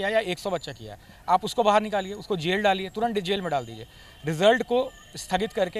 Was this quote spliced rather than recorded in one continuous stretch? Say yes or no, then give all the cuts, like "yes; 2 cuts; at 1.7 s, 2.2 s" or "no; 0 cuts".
no; 0 cuts